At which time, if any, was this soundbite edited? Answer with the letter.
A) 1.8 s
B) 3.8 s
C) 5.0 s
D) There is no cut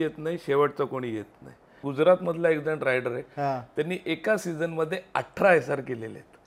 A